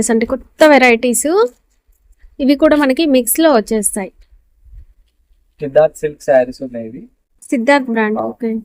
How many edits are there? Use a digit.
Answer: 0